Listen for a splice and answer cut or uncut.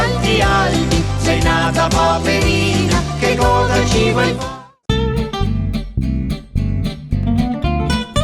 cut